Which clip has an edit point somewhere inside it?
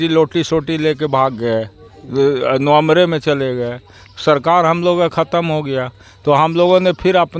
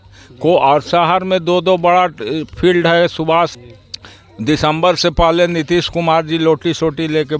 second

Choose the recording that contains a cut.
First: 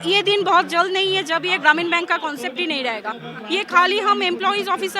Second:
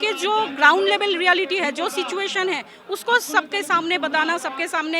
first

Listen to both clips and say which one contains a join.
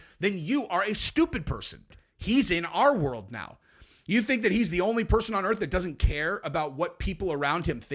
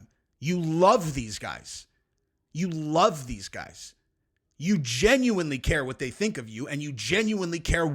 first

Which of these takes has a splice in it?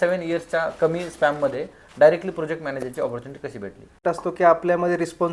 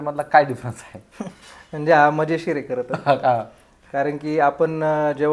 first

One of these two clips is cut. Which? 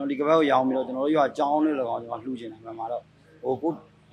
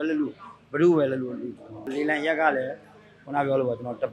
second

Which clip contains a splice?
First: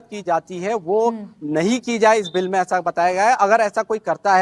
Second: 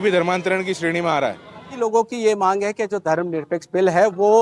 second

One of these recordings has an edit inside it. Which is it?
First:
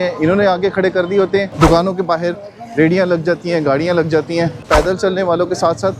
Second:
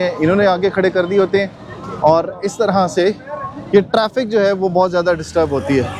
first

